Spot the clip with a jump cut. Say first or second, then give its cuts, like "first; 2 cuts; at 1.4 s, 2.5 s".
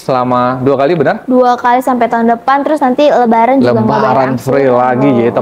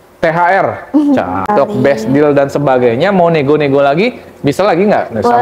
second; 1 cut; at 1.5 s